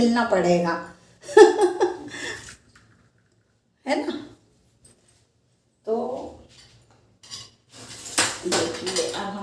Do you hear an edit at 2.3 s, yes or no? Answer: no